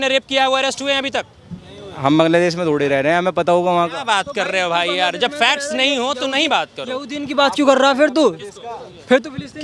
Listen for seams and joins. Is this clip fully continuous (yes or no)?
yes